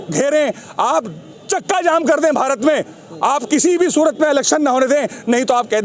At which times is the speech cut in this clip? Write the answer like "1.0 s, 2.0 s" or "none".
none